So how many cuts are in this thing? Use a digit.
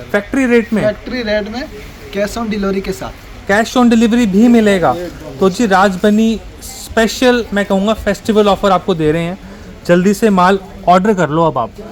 0